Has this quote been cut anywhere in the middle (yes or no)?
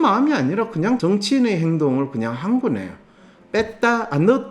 yes